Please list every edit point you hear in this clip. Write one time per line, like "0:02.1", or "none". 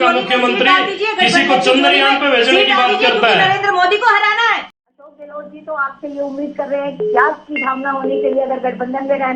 0:04.6